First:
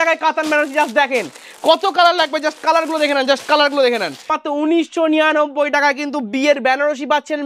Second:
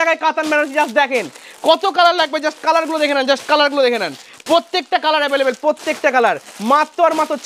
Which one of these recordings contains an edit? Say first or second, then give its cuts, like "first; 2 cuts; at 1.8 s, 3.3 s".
first; 1 cut; at 4.3 s